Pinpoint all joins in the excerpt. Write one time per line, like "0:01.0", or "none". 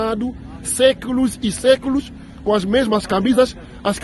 0:01.1